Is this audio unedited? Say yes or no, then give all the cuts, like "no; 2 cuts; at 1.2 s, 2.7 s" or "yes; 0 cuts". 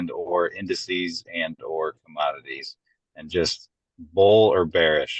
yes; 0 cuts